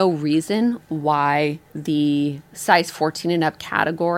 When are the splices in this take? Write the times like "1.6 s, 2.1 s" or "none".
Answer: 1.7 s, 2.5 s

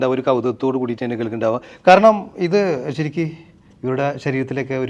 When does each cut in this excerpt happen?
none

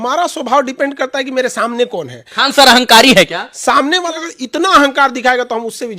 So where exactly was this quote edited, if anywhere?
4.1 s

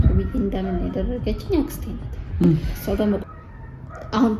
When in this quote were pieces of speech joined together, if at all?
3.2 s

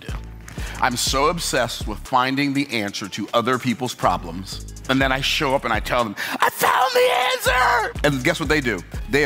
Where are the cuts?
none

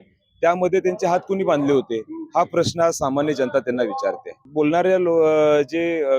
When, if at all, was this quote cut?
4.4 s

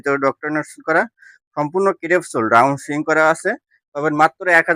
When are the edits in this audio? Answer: none

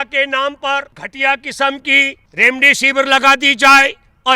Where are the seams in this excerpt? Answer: 1.0 s, 2.2 s

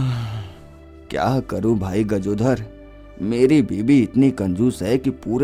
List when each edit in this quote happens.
none

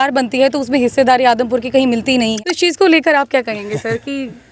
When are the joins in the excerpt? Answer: 2.4 s

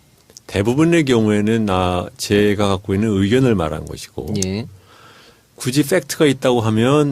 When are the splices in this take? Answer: 4.4 s

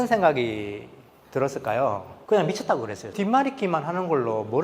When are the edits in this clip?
2.1 s, 3.1 s

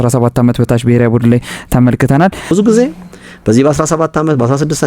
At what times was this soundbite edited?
2.5 s

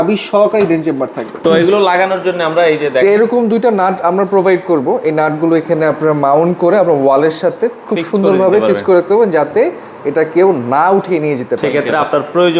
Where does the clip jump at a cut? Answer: 1.4 s, 11.6 s

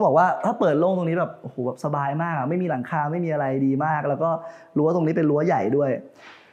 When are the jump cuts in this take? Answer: none

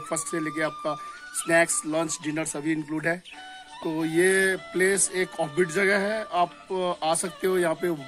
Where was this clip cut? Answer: 3.8 s

